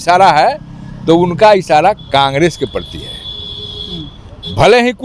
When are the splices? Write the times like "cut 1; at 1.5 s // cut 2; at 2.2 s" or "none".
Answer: none